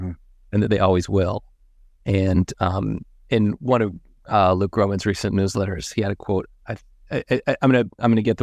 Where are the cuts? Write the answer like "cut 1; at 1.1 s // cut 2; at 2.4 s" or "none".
none